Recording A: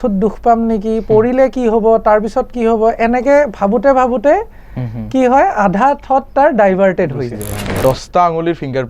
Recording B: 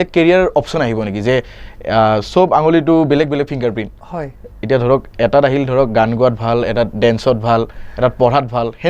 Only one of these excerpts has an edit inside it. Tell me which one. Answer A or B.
A